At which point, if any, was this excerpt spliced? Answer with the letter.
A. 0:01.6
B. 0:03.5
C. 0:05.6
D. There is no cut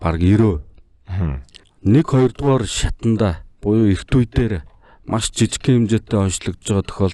D